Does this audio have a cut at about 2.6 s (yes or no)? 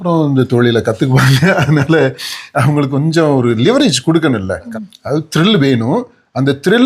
no